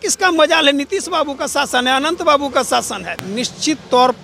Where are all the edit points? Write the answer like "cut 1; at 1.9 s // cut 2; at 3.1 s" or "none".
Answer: cut 1; at 3.2 s

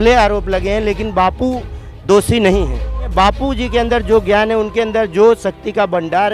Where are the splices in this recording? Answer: cut 1; at 3.1 s

